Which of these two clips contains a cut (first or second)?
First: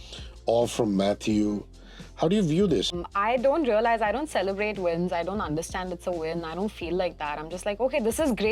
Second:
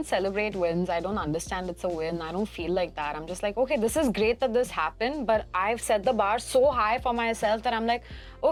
first